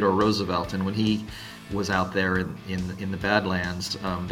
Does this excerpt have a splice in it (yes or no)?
no